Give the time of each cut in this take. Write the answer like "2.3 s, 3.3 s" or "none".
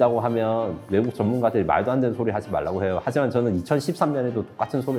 none